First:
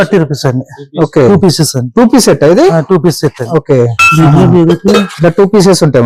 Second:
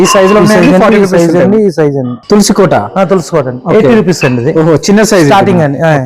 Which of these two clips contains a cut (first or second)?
second